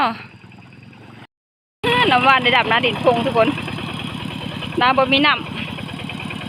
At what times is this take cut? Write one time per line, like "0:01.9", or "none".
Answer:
0:01.3